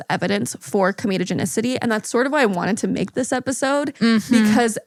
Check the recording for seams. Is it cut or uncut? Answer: uncut